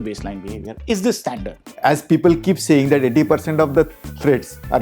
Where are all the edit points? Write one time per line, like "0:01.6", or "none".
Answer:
0:01.7